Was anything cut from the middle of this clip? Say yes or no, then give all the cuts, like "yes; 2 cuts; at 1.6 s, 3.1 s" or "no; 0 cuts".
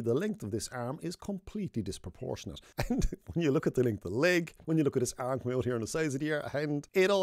no; 0 cuts